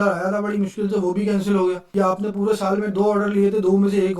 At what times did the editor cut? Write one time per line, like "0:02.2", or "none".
0:01.8